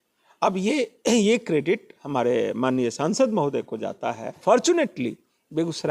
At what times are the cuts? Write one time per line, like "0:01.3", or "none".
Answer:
0:04.4